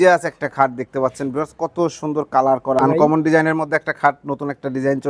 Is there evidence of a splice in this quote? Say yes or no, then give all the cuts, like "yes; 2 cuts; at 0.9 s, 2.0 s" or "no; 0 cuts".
yes; 1 cut; at 2.8 s